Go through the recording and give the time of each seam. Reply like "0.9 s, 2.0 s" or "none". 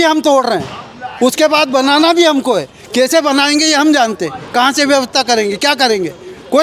none